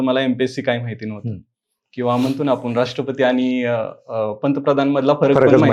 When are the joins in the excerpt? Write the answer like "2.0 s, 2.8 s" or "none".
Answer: none